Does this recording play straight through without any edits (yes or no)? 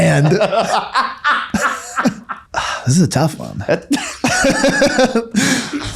no